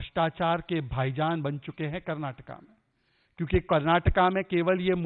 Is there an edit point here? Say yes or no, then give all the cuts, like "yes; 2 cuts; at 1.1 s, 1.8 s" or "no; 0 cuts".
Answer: no; 0 cuts